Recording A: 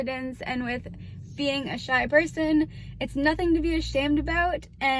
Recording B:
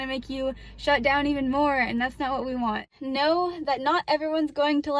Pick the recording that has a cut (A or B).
B